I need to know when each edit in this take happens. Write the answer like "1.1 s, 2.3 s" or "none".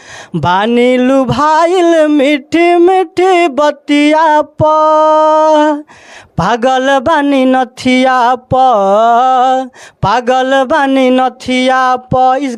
none